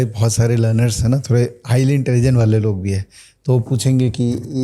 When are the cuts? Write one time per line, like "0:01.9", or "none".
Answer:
none

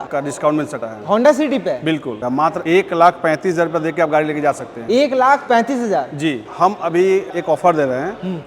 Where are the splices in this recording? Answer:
0:02.2
0:06.4
0:07.3

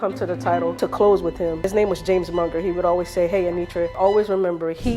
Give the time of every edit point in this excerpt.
0:00.7
0:01.7
0:03.9

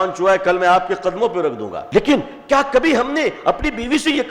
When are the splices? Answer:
0:01.7

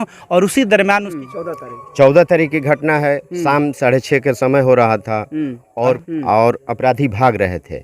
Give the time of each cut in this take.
0:01.2
0:06.0

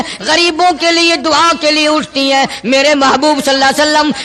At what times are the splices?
none

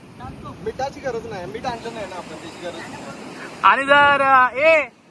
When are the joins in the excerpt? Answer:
none

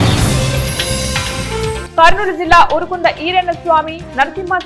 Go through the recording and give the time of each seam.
none

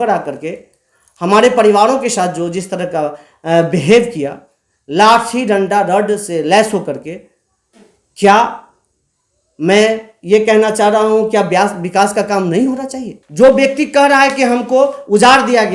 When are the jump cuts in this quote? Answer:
0:13.2

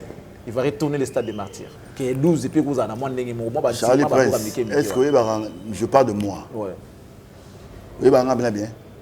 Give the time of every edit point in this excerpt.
0:01.6

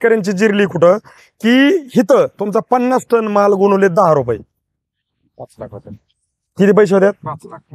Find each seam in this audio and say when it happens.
0:01.1

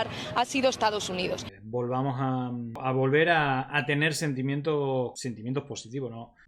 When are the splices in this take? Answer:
0:01.5
0:02.8
0:05.1

